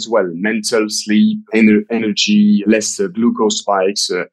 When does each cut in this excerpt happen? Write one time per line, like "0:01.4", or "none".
0:01.4
0:02.6